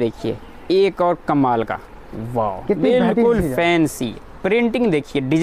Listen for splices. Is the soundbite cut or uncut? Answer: uncut